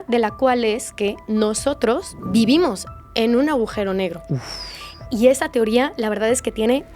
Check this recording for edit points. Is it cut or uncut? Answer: cut